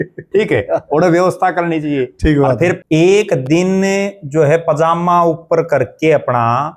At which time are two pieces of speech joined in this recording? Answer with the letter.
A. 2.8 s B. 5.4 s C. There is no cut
A